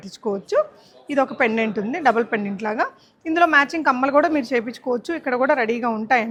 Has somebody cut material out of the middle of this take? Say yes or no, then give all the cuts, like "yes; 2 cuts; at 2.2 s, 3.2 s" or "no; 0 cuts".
no; 0 cuts